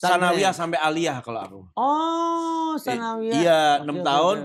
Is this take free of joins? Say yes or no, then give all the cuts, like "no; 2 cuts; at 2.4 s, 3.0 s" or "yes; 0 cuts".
yes; 0 cuts